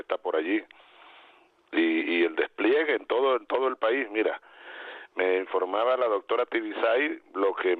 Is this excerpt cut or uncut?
cut